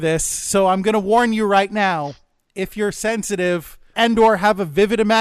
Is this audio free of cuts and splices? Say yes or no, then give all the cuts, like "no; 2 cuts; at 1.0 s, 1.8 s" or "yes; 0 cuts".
yes; 0 cuts